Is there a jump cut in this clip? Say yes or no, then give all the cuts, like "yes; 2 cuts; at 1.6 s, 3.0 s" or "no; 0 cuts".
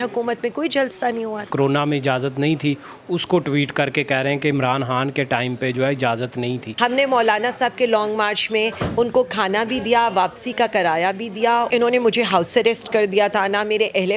yes; 3 cuts; at 1.5 s, 6.7 s, 11.7 s